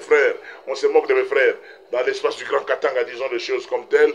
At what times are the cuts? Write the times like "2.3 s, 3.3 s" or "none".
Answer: none